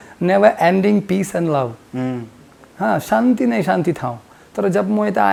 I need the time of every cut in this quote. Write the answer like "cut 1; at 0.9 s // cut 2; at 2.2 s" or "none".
none